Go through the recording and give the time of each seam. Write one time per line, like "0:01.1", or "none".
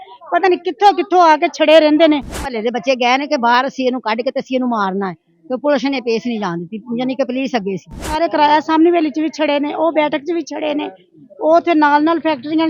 0:02.5
0:08.2

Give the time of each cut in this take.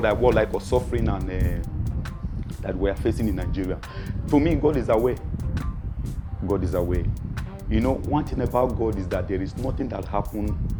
none

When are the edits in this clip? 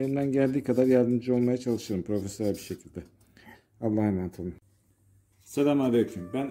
0:04.6

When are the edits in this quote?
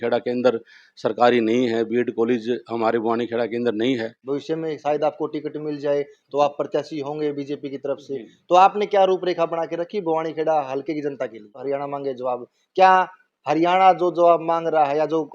0:04.1
0:11.6

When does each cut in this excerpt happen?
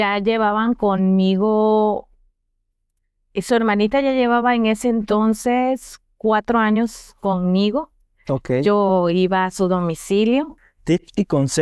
0:10.7

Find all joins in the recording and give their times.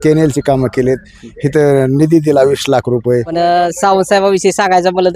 0:03.3

